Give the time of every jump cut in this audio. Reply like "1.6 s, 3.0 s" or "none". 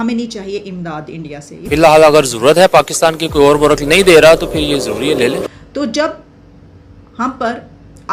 1.6 s, 5.5 s